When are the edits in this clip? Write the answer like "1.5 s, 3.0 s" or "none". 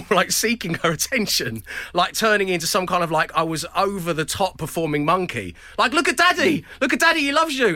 none

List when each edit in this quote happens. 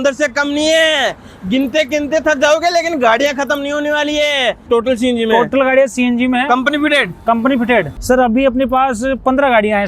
4.6 s, 8.0 s

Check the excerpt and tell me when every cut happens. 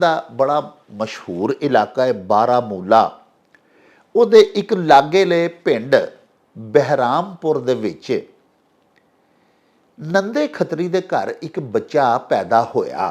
none

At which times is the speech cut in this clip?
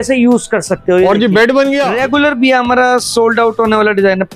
1.8 s

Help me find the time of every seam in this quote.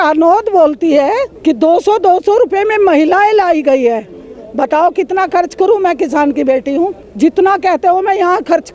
1.3 s, 7.0 s

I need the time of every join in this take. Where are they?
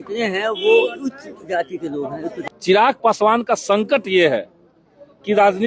2.2 s

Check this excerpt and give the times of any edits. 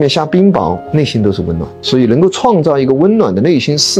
1.7 s

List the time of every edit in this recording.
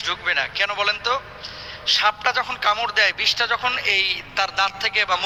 none

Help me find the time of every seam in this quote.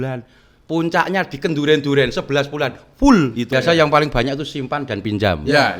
3.5 s

